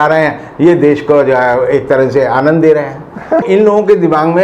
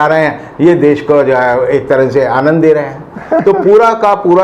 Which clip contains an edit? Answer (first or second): first